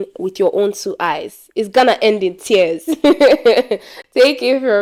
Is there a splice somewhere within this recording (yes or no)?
no